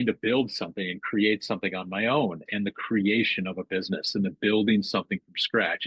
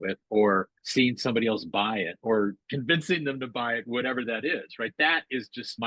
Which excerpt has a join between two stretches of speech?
first; 1 cut; at 2.4 s

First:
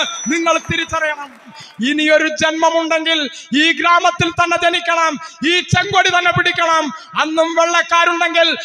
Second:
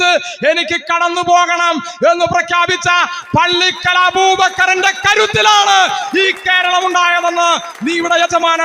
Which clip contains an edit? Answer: first; 1 cut; at 1.6 s

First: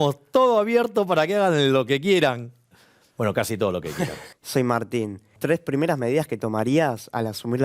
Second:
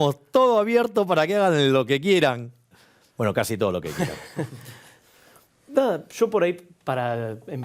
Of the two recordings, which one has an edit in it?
first; 2 cuts; at 4.2 s, 5.3 s

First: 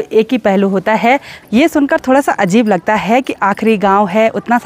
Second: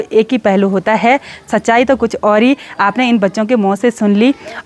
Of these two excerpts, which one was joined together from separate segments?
first; 1 cut; at 1.3 s

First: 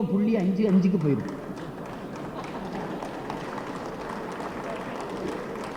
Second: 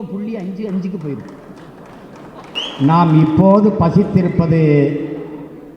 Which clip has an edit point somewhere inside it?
second; 1 cut; at 2.6 s

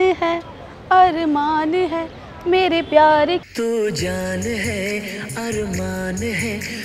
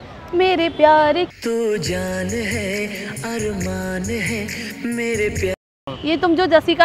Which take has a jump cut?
second; 1 cut; at 5.9 s

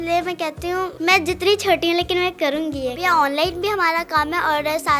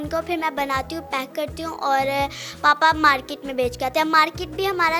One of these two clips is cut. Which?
first; 2 cuts; at 0.9 s, 3.0 s

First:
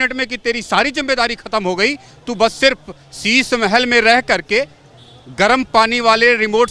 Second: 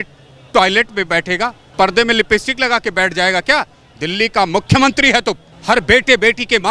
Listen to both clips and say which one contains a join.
second; 2 cuts; at 1.6 s, 5.5 s

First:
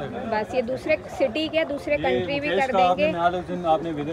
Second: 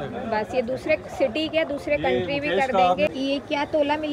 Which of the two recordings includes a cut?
second; 1 cut; at 3.1 s

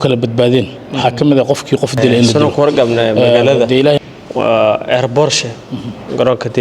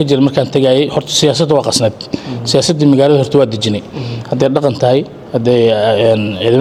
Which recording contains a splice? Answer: first; 1 cut; at 2.3 s

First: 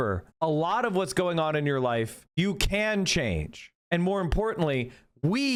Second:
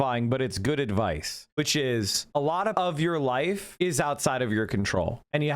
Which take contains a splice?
second; 2 cuts; at 2.7 s, 3.7 s

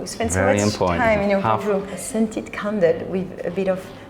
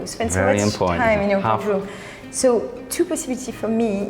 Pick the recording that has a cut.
first; 1 cut; at 2.0 s

